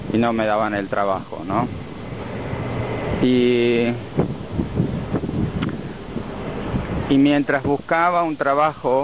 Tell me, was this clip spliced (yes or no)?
no